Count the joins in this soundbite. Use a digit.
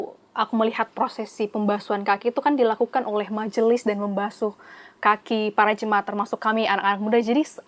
0